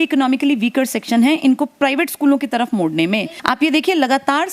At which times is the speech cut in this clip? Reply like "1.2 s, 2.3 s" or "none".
3.3 s